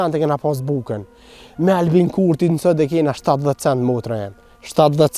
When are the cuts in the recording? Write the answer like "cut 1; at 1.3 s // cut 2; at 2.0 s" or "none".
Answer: none

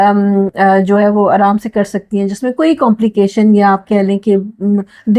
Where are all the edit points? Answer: none

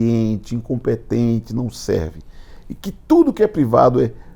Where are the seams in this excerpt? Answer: none

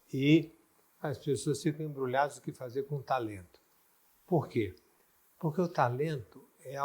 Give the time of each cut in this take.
none

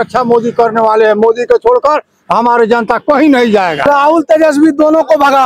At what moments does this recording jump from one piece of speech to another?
cut 1; at 3.9 s

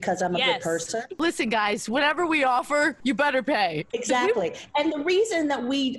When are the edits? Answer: cut 1; at 1.1 s // cut 2; at 3.9 s

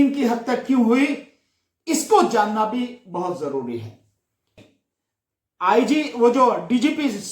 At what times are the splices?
cut 1; at 4.6 s

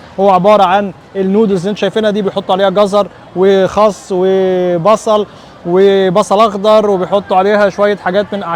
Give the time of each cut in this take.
none

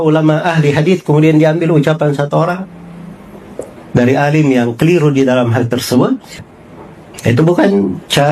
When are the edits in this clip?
cut 1; at 6.4 s

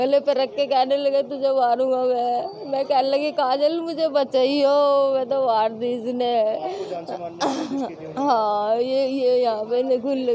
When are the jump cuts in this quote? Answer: none

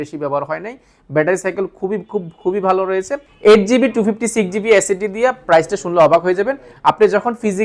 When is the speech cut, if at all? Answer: cut 1; at 3.2 s // cut 2; at 6.6 s

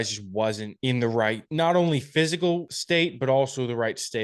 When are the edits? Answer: cut 1; at 0.9 s // cut 2; at 2.7 s

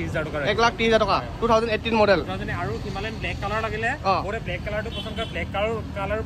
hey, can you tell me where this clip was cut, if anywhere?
none

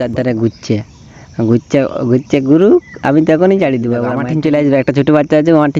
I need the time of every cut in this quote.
cut 1; at 4.1 s

